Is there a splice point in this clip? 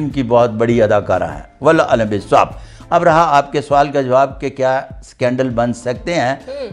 no; 0 cuts

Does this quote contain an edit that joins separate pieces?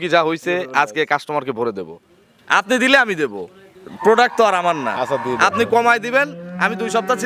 no; 0 cuts

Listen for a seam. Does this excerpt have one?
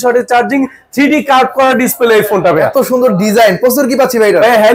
no; 0 cuts

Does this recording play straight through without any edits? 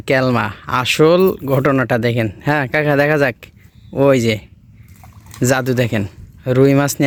yes; 0 cuts

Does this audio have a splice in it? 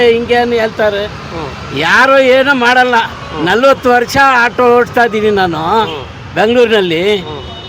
no; 0 cuts

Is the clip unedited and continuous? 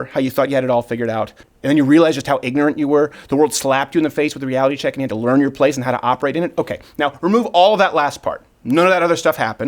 no; 1 cut; at 1.4 s

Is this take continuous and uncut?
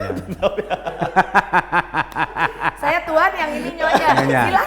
yes; 0 cuts

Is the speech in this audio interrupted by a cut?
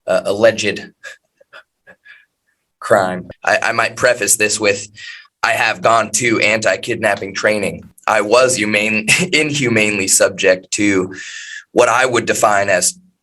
yes; 2 cuts; at 3.3 s, 7.9 s

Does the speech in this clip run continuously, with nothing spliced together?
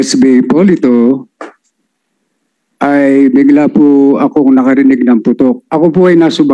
no; 1 cut; at 5.6 s

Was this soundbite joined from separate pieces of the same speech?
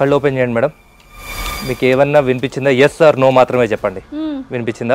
no; 0 cuts

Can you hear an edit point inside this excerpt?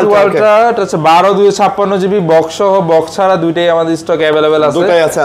no; 0 cuts

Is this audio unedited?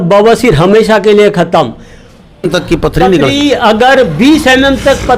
no; 1 cut; at 2.5 s

